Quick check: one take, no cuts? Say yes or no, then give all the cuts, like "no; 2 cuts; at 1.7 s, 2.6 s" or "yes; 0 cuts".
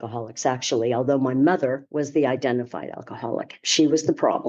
yes; 0 cuts